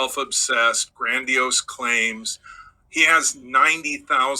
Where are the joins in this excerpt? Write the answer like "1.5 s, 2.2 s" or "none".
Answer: none